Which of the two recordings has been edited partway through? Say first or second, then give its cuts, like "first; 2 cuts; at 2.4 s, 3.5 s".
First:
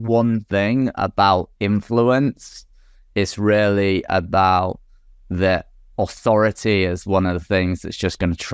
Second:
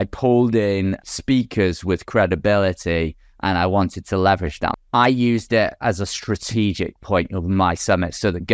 second; 2 cuts; at 1.0 s, 4.7 s